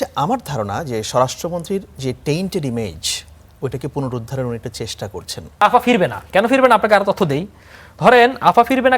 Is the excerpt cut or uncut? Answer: cut